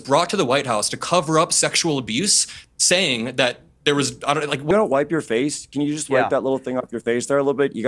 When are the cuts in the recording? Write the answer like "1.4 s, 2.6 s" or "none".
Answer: 4.7 s